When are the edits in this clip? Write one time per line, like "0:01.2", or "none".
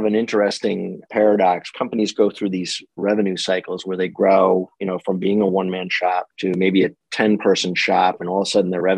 0:01.0
0:01.7
0:06.3

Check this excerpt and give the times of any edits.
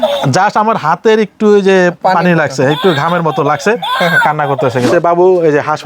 0:04.9

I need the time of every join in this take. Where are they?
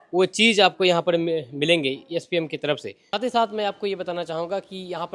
0:03.0

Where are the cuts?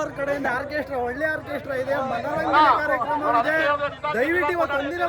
none

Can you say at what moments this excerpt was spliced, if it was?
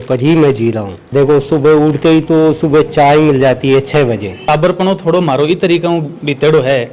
0:00.9
0:04.4

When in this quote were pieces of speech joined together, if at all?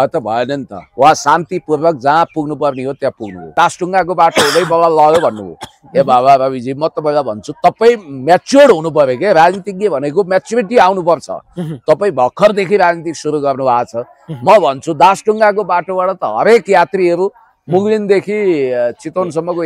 0:03.5

